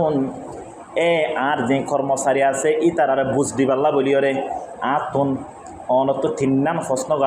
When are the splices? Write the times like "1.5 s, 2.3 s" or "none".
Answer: none